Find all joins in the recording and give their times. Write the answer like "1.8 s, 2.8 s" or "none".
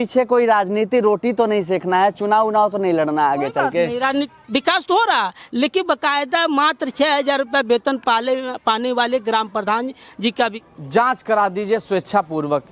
4.3 s, 10.6 s